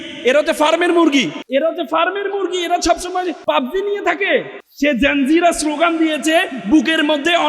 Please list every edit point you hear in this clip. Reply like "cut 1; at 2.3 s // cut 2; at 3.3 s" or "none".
cut 1; at 1.4 s // cut 2; at 3.4 s // cut 3; at 4.6 s